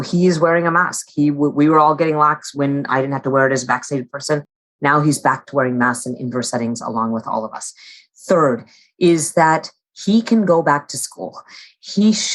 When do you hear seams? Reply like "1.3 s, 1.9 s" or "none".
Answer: 2.5 s